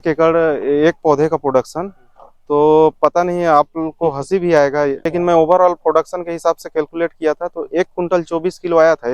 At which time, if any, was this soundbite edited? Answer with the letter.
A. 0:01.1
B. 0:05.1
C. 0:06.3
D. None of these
B